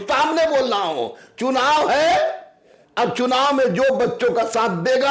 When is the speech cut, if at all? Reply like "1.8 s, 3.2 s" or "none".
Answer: none